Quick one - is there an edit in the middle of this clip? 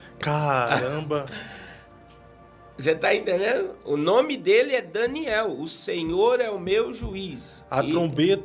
no; 0 cuts

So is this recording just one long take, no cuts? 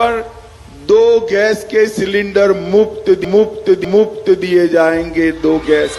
yes; 0 cuts

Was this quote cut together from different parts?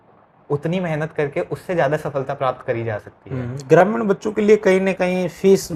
no; 0 cuts

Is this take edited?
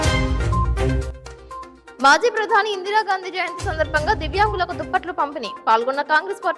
no; 0 cuts

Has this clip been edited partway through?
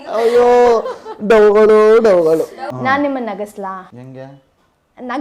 yes; 1 cut; at 2.7 s

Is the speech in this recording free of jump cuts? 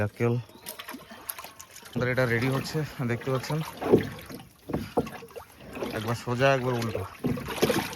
no; 1 cut; at 2.0 s

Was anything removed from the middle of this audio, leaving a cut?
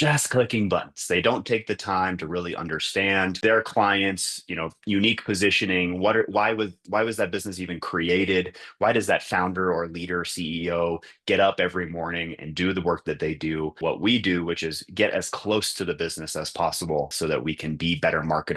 yes; 2 cuts; at 13.8 s, 17.1 s

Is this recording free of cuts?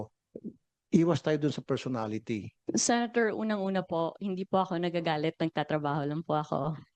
no; 1 cut; at 2.5 s

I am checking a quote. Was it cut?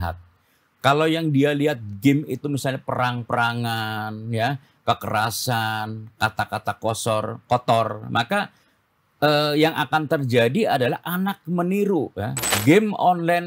yes; 1 cut; at 12.5 s

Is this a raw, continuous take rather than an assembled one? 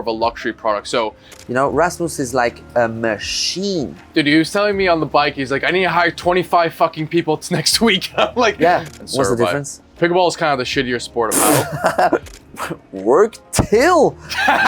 no; 5 cuts; at 1.2 s, 4.0 s, 8.9 s, 9.8 s, 12.3 s

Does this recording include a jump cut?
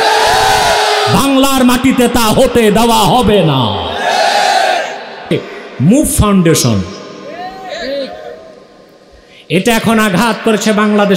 yes; 1 cut; at 5.3 s

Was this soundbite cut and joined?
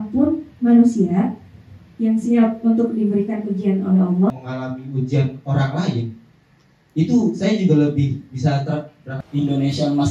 yes; 2 cuts; at 4.3 s, 9.1 s

